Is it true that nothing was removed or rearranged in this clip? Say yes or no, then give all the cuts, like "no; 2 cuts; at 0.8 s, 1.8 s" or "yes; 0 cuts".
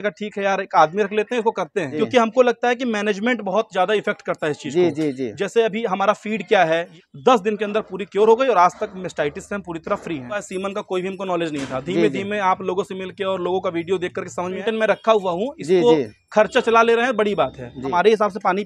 no; 5 cuts; at 1.9 s, 6.9 s, 10.5 s, 14.6 s, 17.9 s